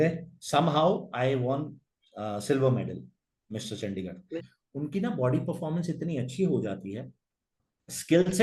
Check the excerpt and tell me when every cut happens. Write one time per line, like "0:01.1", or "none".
0:04.5